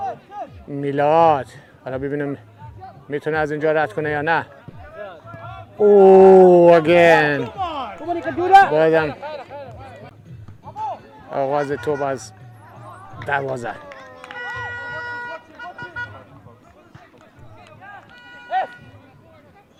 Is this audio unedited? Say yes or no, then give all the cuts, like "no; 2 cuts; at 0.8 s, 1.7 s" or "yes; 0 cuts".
yes; 0 cuts